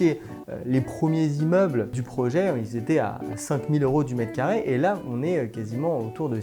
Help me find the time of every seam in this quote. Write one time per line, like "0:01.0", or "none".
0:02.0